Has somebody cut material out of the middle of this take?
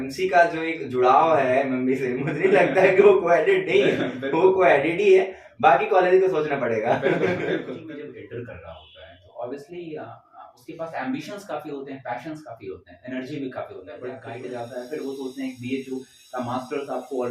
yes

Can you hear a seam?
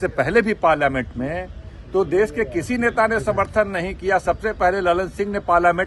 no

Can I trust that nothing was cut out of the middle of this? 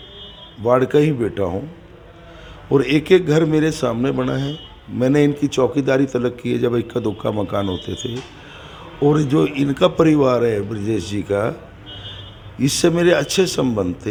yes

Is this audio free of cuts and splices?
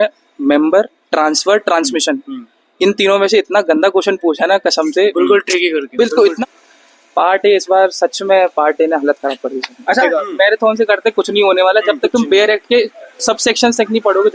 no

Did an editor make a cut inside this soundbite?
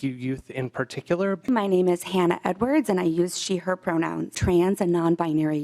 yes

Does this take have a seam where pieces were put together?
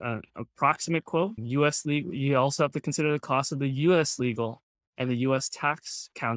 no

